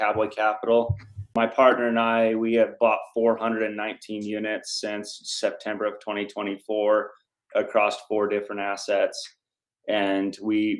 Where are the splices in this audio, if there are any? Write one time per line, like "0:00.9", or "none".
0:01.2